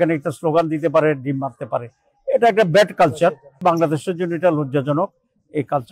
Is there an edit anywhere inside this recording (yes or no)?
yes